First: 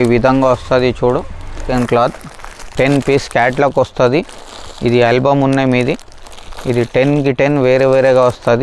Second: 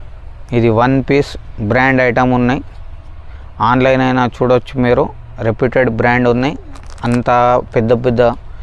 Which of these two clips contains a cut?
first; 1 cut; at 1.7 s

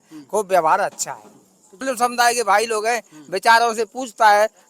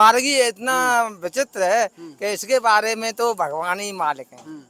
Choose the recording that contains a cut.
first; 1 cut; at 1.8 s

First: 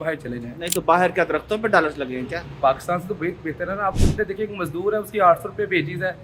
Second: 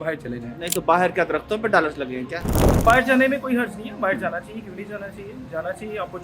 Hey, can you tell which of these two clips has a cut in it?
second; 1 cut; at 2.8 s

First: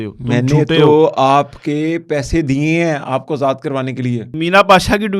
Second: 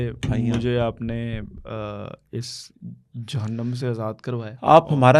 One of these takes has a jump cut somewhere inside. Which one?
first; 1 cut; at 4.2 s

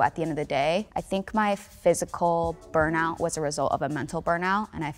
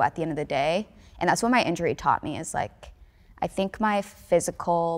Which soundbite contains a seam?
first; 1 cut; at 1.0 s

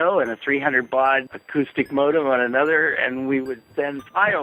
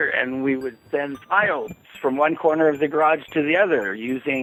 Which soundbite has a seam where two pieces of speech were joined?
first; 1 cut; at 1.4 s

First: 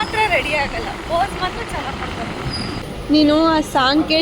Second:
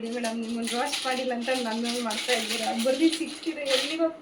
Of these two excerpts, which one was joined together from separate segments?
first; 1 cut; at 2.9 s

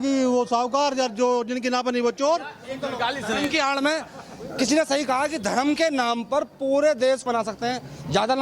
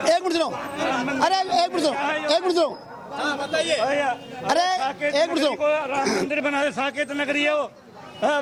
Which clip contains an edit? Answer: first; 2 cuts; at 2.6 s, 7.3 s

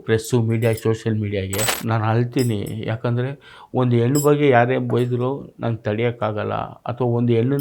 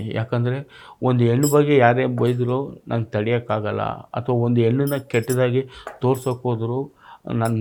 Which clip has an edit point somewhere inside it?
first; 1 cut; at 1.7 s

